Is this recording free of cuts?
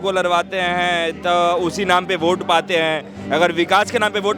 yes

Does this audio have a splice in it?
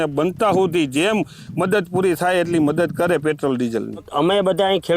no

